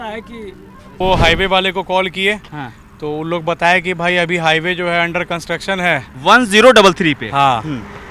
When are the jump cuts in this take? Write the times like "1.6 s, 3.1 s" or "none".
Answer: 1.0 s